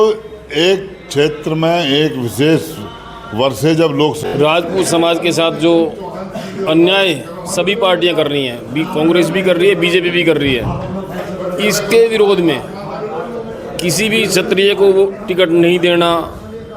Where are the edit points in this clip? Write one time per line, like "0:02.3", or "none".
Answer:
0:04.3